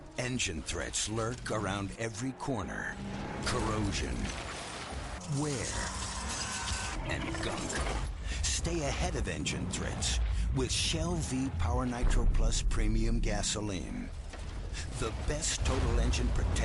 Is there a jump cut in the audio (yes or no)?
no